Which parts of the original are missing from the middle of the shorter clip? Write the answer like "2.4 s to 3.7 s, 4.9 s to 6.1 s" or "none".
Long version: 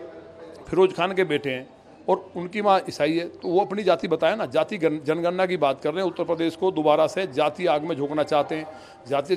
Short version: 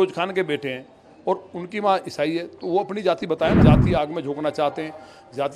4.4 s to 7.3 s